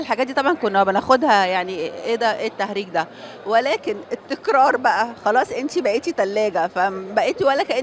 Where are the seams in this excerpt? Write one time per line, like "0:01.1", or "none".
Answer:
none